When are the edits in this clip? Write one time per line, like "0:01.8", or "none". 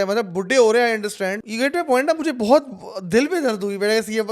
0:01.4